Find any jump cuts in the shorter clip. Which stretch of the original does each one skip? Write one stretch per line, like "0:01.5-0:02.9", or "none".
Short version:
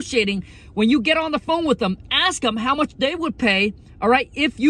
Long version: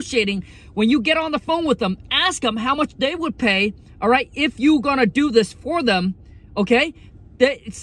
none